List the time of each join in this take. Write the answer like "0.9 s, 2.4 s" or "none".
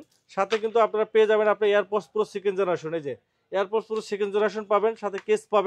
none